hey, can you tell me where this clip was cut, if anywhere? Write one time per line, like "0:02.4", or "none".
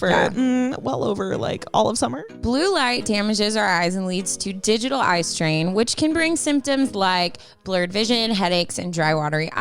0:02.3